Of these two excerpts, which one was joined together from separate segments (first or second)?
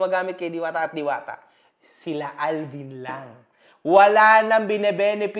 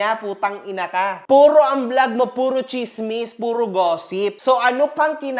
second